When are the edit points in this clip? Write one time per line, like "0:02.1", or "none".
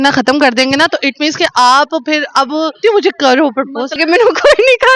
0:02.8
0:04.0